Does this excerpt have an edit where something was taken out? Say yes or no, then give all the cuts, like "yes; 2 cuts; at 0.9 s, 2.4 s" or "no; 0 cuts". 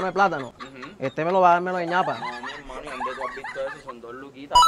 no; 0 cuts